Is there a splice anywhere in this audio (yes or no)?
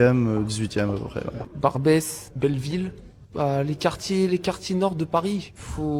no